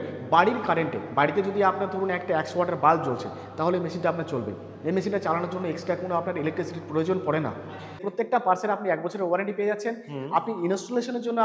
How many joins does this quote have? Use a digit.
1